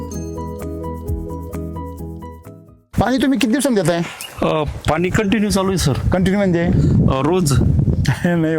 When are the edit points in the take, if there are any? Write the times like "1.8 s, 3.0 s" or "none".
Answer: none